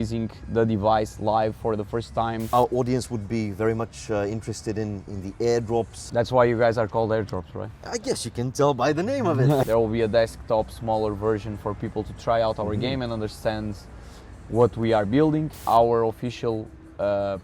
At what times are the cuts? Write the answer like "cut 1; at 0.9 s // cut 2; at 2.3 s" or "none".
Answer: cut 1; at 2.5 s // cut 2; at 6.0 s // cut 3; at 9.6 s // cut 4; at 15.5 s

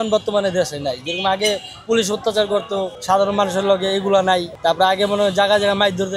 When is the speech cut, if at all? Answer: cut 1; at 2.9 s // cut 2; at 4.5 s

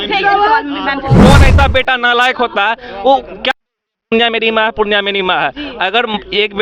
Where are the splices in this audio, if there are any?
cut 1; at 1.2 s

